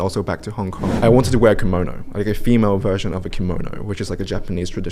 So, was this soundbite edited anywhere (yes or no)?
yes